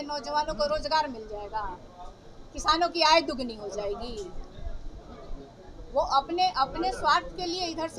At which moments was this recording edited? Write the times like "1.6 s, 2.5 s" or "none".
none